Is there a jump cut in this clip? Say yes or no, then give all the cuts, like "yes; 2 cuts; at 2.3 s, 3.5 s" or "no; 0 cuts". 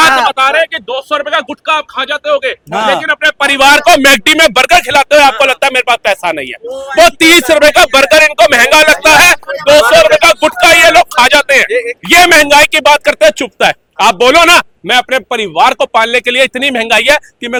no; 0 cuts